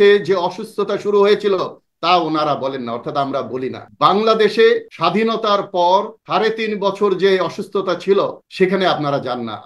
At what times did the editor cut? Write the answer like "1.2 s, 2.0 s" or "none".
3.8 s, 4.9 s, 6.2 s, 8.4 s